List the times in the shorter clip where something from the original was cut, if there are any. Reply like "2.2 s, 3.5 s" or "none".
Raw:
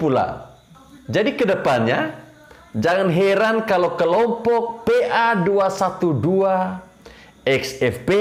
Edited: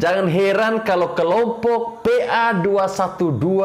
none